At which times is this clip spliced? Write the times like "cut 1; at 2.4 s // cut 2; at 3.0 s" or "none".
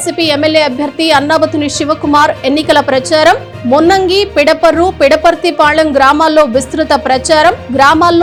none